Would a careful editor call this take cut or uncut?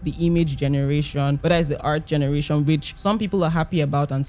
cut